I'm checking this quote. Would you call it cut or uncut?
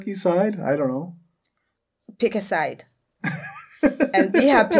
uncut